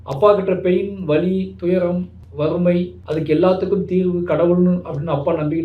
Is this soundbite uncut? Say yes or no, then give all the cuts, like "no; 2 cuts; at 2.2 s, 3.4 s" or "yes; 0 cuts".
no; 2 cuts; at 2.2 s, 3.0 s